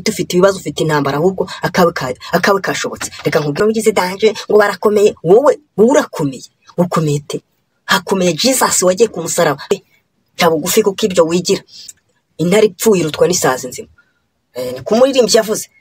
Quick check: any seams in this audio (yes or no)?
yes